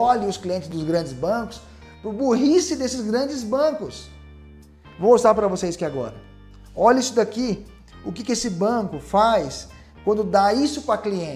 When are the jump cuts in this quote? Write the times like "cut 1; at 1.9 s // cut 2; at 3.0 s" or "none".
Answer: none